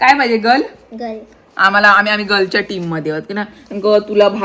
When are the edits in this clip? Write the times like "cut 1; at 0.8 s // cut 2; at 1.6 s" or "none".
none

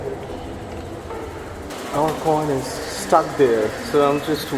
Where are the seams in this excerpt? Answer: cut 1; at 1.1 s

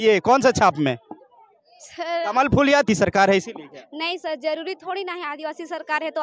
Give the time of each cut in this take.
cut 1; at 2.9 s

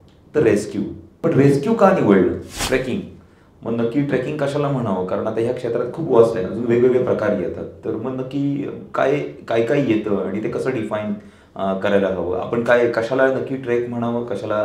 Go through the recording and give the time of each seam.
cut 1; at 1.2 s // cut 2; at 2.6 s

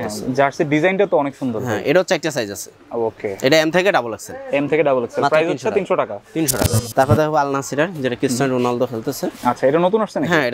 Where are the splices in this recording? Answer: cut 1; at 6.8 s

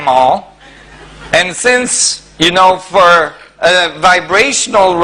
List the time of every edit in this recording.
cut 1; at 1.7 s

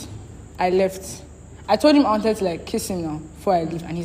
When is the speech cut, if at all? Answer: none

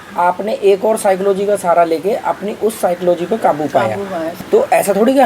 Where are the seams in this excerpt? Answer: cut 1; at 4.4 s

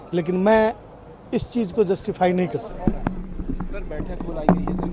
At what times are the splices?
none

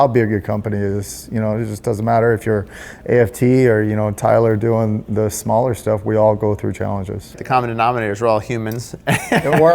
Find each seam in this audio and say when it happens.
cut 1; at 7.4 s

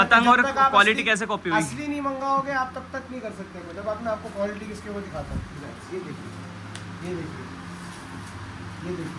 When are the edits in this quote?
none

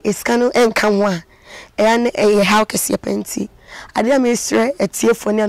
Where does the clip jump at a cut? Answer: none

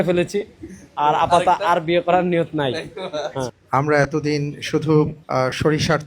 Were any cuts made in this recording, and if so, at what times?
cut 1; at 3.6 s // cut 2; at 5.2 s

